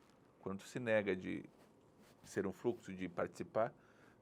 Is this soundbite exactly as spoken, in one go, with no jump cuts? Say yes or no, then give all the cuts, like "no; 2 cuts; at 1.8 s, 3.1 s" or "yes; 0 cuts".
yes; 0 cuts